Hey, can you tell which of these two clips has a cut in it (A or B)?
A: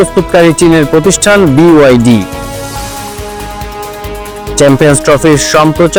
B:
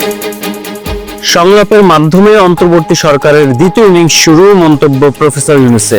B